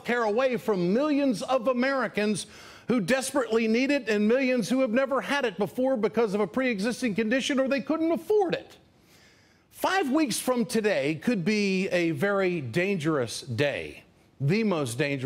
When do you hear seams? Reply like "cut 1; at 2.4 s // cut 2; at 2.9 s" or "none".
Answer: cut 1; at 10.8 s